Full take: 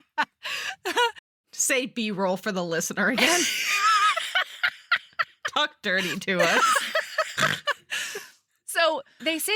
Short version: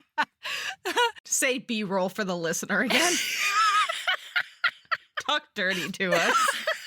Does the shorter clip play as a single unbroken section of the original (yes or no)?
no